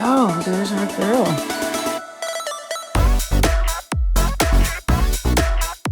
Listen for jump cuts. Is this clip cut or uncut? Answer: cut